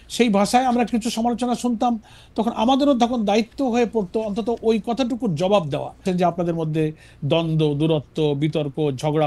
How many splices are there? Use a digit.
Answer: 1